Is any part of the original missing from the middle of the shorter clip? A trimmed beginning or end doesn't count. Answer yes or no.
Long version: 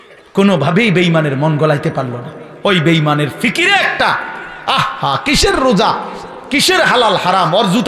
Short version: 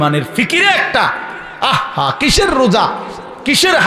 no